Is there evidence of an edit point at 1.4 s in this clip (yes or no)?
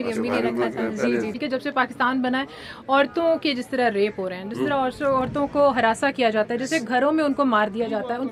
yes